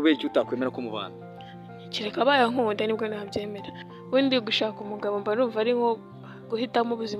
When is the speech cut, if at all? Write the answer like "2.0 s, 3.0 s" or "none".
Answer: 3.8 s